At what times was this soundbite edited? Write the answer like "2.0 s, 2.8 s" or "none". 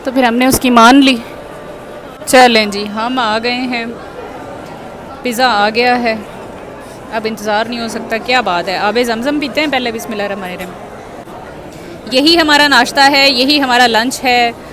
2.2 s, 11.3 s